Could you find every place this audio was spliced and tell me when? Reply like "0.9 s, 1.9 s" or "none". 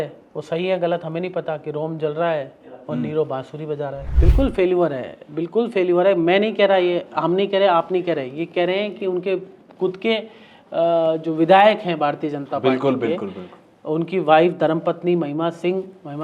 4.1 s